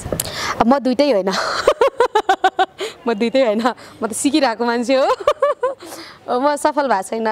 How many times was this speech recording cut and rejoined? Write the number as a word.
zero